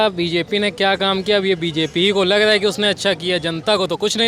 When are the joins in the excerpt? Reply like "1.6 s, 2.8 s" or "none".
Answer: none